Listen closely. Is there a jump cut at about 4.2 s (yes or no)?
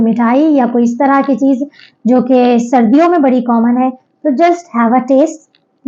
no